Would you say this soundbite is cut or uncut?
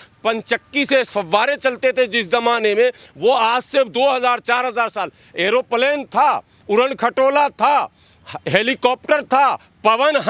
uncut